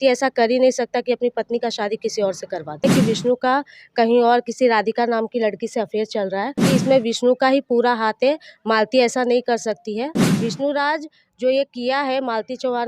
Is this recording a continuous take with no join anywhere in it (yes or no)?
no